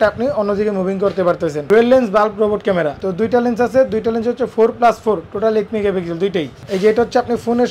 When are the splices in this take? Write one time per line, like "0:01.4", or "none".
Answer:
0:01.6
0:03.0
0:06.7

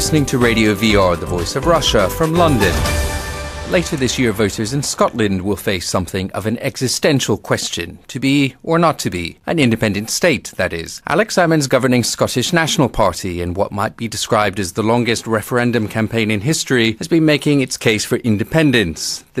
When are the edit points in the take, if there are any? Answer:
none

